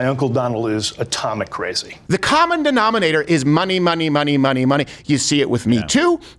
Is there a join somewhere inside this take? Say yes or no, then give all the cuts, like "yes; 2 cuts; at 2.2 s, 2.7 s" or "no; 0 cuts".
yes; 1 cut; at 1.9 s